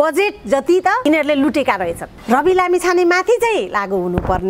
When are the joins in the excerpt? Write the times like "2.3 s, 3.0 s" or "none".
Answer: 1.0 s, 2.1 s